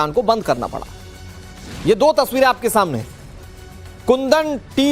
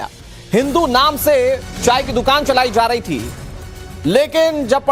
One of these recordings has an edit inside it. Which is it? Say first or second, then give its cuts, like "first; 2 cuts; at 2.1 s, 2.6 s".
first; 1 cut; at 2.3 s